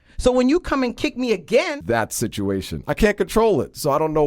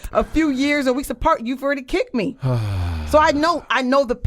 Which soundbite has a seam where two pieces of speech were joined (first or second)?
first